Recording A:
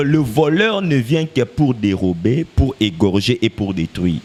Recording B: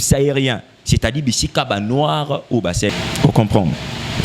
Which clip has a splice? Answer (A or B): B